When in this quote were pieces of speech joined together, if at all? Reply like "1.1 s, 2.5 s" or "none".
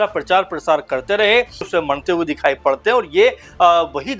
1.7 s